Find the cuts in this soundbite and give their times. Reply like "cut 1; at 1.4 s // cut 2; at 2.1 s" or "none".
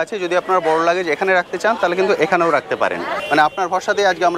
cut 1; at 3.1 s